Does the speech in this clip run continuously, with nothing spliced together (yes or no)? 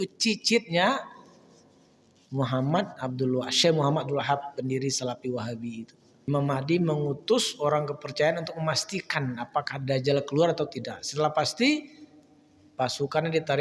no